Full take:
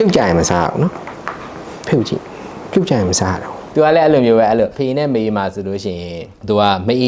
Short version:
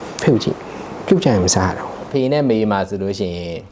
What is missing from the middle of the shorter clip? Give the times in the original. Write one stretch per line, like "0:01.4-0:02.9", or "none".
0:03.7-0:04.7